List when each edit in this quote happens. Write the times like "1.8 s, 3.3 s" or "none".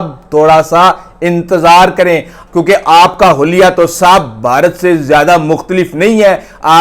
2.4 s

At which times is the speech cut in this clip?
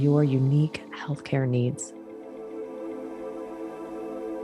1.9 s

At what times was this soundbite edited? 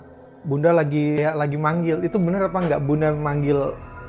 1.2 s

